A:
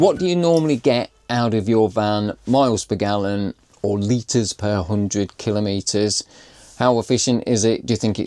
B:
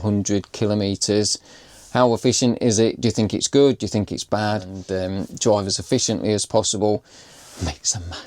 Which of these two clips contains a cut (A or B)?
B